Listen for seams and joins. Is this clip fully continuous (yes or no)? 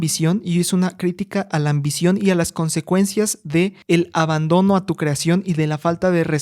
no